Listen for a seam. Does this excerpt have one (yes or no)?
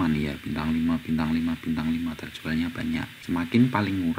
yes